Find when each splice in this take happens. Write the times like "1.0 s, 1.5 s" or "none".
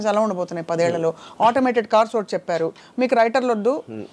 none